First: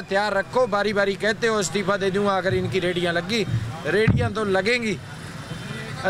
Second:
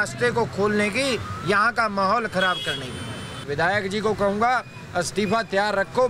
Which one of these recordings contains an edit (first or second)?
second